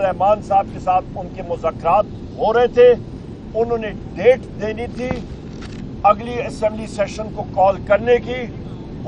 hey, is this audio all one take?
yes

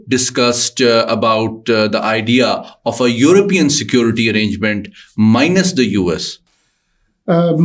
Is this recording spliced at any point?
no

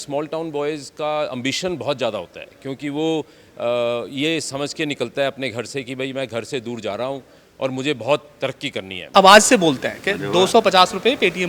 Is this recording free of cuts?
no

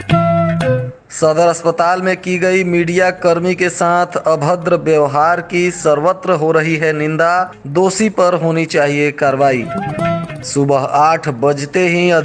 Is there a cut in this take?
yes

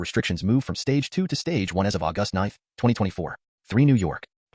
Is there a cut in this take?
yes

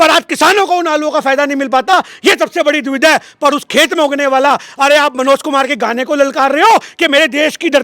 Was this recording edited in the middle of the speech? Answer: no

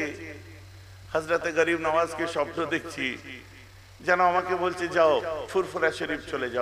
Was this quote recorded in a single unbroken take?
yes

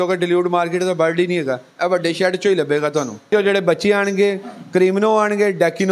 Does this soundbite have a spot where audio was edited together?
yes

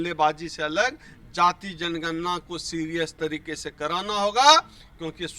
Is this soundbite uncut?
yes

